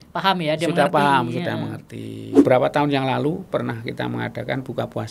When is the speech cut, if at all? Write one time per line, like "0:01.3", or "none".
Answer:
0:02.3